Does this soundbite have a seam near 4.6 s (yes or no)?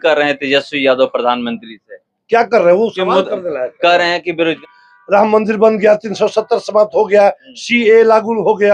yes